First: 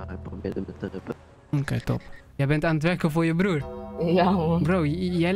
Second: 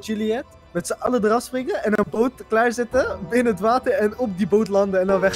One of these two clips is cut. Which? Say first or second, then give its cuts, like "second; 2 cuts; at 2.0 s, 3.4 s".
first; 1 cut; at 2.2 s